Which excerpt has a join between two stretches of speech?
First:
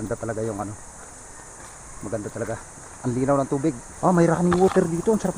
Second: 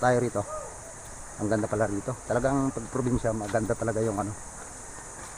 first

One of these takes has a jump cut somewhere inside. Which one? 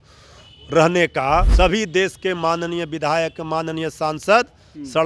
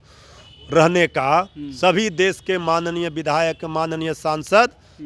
first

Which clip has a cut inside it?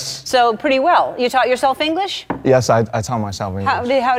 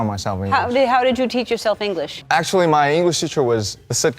second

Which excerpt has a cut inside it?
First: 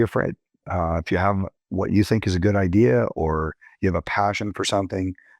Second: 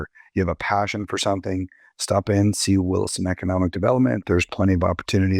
second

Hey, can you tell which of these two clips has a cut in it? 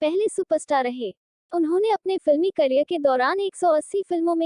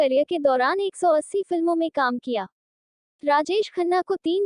second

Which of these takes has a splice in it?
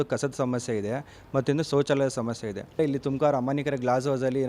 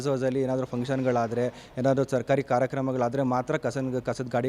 first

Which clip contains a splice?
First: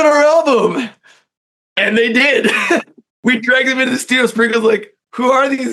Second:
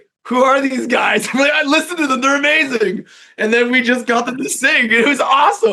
first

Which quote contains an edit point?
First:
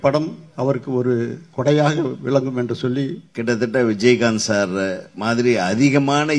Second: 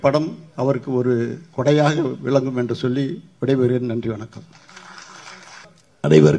first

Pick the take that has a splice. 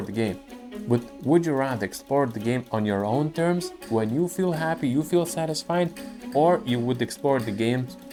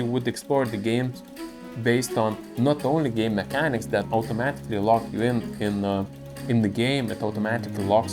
second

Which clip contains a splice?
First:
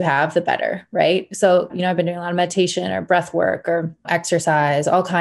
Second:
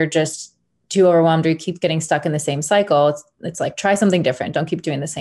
first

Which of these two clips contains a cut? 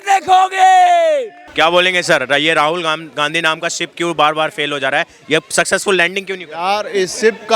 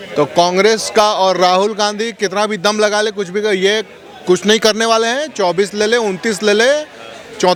first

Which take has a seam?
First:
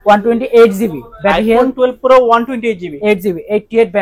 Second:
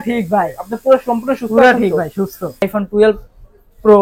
second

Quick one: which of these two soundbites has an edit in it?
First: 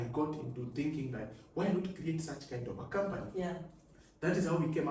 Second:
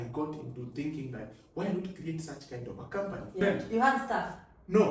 second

